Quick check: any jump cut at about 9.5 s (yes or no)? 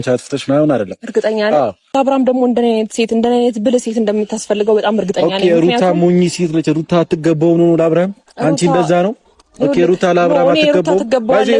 no